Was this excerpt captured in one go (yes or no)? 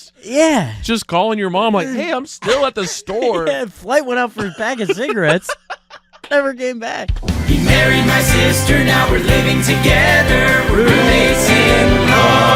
no